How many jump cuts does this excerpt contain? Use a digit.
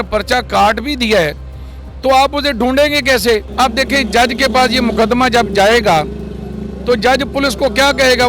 1